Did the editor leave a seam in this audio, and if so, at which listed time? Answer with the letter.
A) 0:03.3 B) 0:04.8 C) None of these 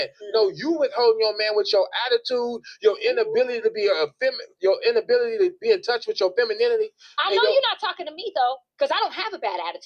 C